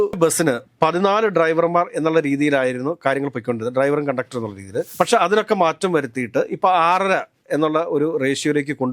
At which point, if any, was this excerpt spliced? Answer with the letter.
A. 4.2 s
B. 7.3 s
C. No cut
C